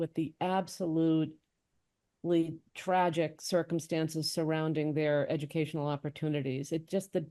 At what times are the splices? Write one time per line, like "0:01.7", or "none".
none